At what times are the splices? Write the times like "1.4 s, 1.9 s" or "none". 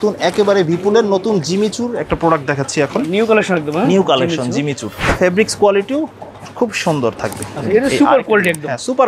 5.0 s